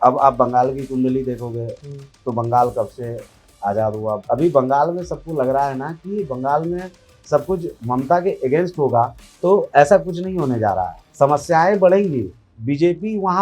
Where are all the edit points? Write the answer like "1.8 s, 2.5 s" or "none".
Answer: 4.2 s, 7.7 s, 11.0 s